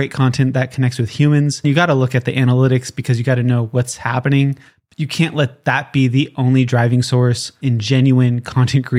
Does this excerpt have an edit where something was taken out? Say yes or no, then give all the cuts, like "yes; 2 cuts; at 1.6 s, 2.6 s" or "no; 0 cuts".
no; 0 cuts